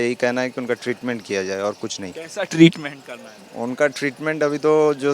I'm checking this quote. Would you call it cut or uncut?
uncut